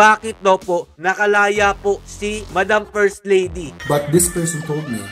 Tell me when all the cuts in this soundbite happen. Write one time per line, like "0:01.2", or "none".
0:03.7